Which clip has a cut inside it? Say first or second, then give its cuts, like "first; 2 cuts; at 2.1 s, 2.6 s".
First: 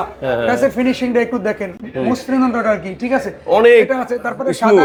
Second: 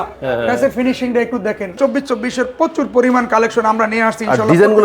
second; 1 cut; at 1.8 s